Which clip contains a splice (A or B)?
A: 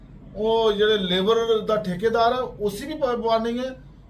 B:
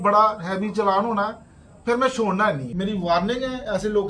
B